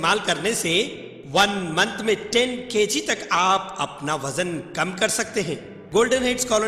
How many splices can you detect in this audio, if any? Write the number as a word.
one